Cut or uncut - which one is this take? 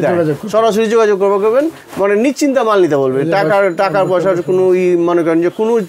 uncut